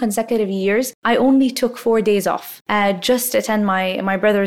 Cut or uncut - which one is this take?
cut